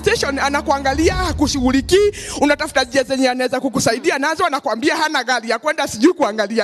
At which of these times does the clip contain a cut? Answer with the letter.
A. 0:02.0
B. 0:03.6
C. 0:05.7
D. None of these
D